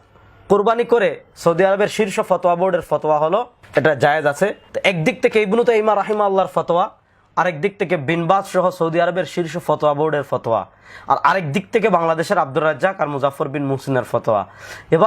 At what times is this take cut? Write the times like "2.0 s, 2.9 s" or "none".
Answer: 4.7 s